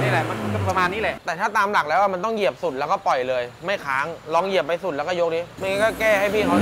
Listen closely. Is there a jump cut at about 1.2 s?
yes; 2 cuts; at 1.2 s, 5.5 s

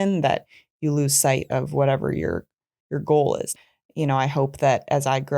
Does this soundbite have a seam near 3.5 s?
yes; 1 cut; at 3.5 s

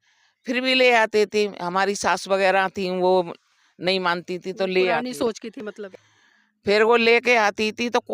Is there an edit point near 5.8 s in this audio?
yes; 1 cut; at 5.8 s

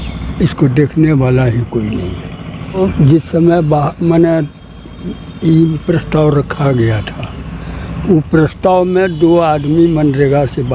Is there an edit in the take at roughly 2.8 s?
yes; 1 cut; at 2.8 s

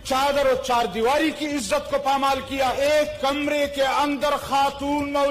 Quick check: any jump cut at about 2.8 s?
yes; 1 cut; at 2.8 s

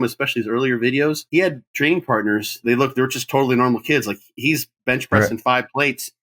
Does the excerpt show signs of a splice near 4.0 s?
no; 2 cuts; at 1.2 s, 2.6 s

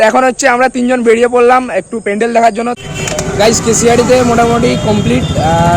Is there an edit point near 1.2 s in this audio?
no; 1 cut; at 2.8 s

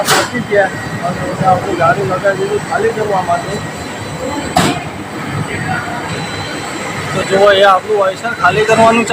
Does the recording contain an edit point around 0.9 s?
no; 0 cuts

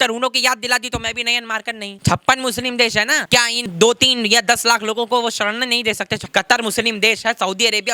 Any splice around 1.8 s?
yes; 3 cuts; at 1.8 s, 3.7 s, 6.2 s

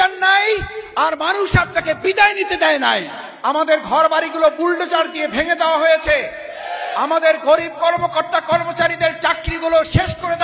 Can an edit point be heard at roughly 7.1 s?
no; 1 cut; at 3.2 s

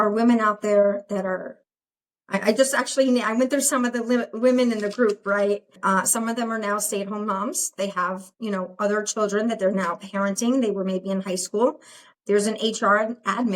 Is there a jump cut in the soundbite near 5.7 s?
yes; 1 cut; at 5.7 s

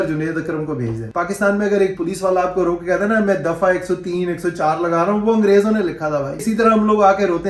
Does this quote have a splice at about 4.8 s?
no; 2 cuts; at 1.0 s, 6.4 s

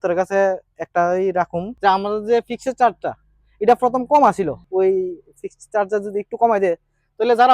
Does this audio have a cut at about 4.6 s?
yes; 2 cuts; at 1.6 s, 4.6 s

